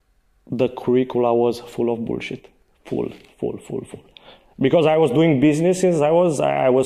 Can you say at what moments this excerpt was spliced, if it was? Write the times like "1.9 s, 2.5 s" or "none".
none

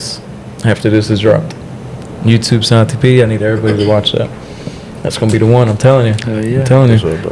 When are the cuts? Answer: none

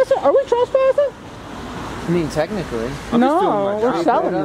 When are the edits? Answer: none

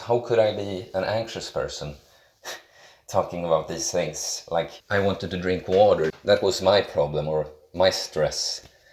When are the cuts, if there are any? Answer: 4.8 s, 6.1 s

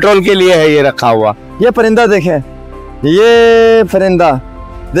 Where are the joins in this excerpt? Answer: 1.4 s

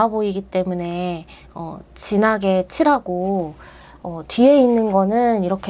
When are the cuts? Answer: none

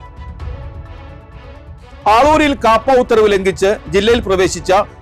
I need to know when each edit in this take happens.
2.0 s

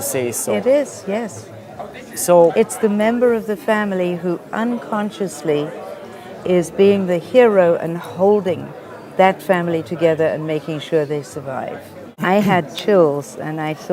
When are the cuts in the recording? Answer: 12.1 s

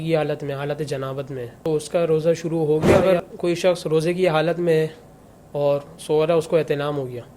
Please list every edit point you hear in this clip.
1.6 s, 2.9 s

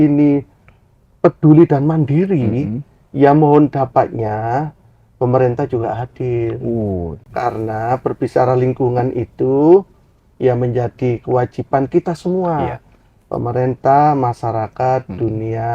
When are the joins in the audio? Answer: none

